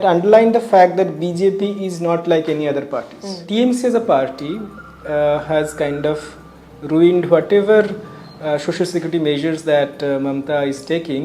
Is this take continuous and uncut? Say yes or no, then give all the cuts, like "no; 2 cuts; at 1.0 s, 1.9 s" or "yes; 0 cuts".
no; 1 cut; at 3.4 s